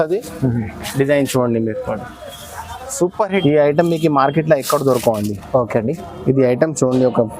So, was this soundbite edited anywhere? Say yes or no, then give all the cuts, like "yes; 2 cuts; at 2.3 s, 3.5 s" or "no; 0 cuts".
yes; 1 cut; at 3.4 s